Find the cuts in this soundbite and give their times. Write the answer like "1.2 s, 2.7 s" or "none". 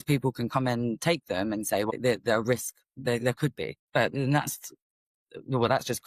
1.9 s, 3.8 s